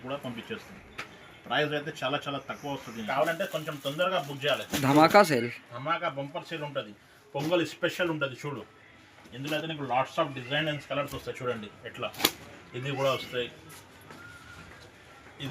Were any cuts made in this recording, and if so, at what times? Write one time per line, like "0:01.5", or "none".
0:03.0